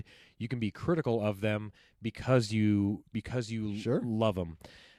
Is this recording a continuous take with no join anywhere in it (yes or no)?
yes